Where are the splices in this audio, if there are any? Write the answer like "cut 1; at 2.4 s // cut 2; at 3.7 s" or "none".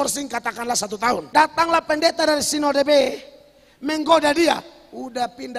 cut 1; at 1.2 s